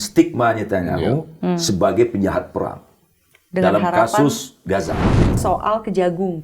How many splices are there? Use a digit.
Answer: 1